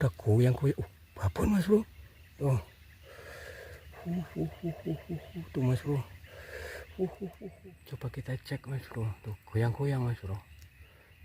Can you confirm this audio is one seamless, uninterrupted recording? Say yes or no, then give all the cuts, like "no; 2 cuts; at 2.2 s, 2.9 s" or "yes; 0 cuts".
no; 1 cut; at 7.5 s